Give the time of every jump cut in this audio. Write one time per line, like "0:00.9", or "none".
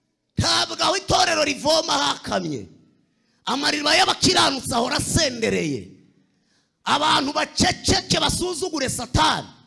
none